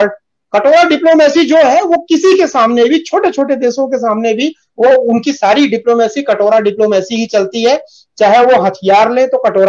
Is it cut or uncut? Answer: uncut